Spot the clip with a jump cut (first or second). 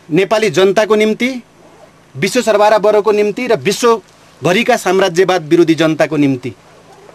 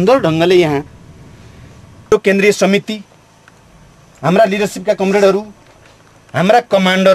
second